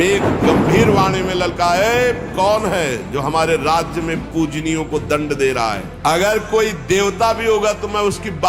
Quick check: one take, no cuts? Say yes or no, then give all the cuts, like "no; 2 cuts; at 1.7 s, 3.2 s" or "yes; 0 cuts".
no; 1 cut; at 5.9 s